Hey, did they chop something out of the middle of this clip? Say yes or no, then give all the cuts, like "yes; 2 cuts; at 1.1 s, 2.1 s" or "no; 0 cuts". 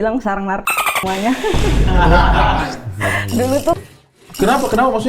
yes; 1 cut; at 3.8 s